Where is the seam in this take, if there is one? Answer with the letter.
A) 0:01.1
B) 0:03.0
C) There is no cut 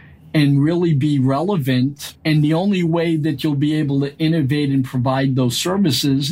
C